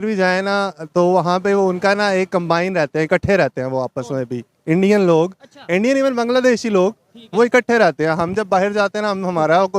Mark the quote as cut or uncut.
uncut